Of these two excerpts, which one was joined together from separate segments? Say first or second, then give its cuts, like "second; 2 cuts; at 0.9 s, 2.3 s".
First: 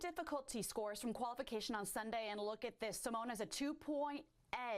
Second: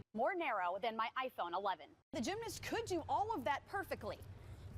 second; 1 cut; at 2.2 s